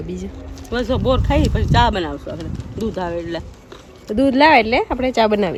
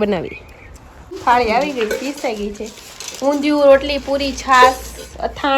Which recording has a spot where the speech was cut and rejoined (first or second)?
second